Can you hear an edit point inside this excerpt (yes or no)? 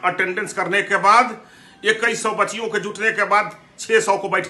no